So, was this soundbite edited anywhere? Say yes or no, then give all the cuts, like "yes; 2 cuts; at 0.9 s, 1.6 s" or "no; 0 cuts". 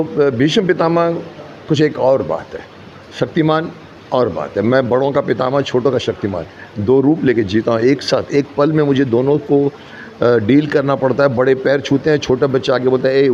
no; 0 cuts